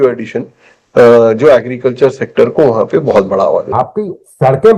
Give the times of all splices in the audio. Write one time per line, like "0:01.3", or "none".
0:03.7

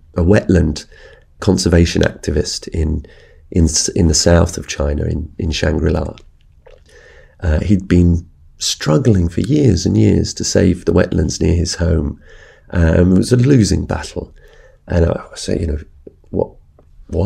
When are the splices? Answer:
0:01.4
0:06.9

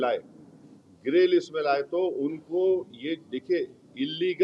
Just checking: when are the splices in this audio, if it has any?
none

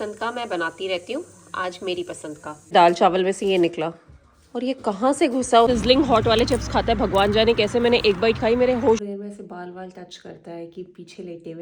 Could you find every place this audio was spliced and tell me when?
0:02.7
0:05.7
0:09.0

